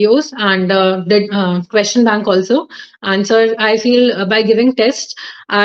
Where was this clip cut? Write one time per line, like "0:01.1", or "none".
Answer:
none